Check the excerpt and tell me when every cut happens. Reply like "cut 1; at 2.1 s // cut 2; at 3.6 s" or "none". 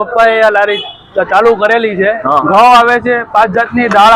cut 1; at 2.4 s